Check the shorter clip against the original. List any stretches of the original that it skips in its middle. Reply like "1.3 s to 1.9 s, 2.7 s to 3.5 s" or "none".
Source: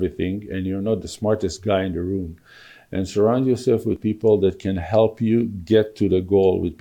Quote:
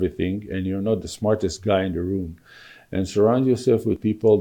none